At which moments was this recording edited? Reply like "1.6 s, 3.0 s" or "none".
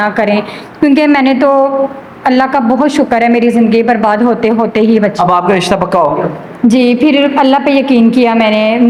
none